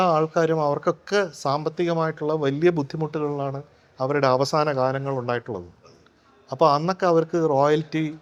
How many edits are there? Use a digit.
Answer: 0